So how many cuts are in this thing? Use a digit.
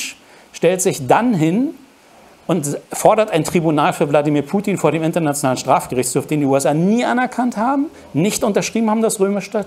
0